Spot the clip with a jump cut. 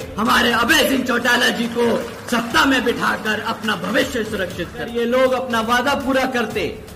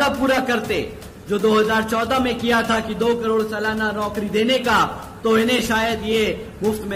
first; 1 cut; at 4.9 s

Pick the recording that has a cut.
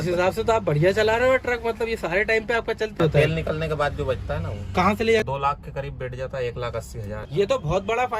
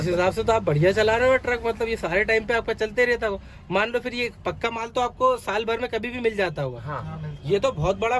first; 3 cuts; at 3.0 s, 5.2 s, 7.2 s

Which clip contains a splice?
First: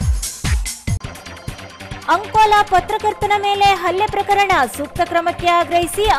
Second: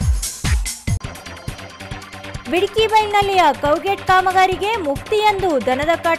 first; 1 cut; at 2.0 s

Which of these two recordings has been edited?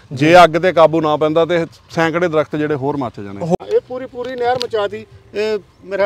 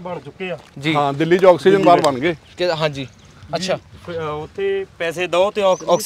first; 1 cut; at 3.6 s

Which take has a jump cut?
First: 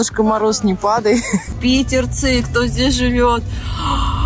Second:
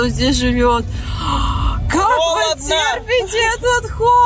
first; 1 cut; at 1.5 s

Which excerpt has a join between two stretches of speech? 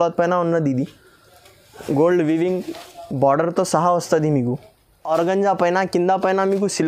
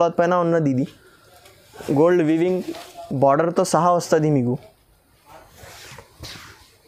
first; 1 cut; at 5.1 s

